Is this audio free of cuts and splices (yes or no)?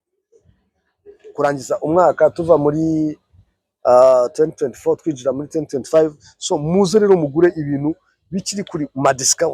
yes